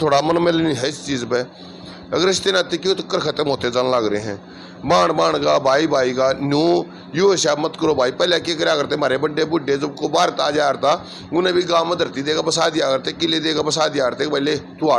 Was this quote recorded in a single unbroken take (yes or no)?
yes